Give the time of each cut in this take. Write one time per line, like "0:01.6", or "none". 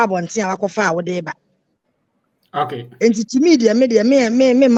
none